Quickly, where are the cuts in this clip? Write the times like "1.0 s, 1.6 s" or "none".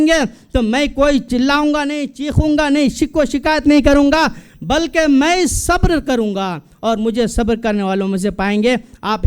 1.3 s